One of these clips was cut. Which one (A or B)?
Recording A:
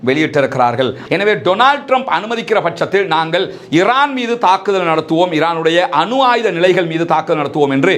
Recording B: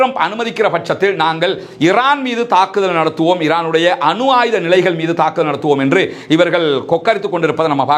A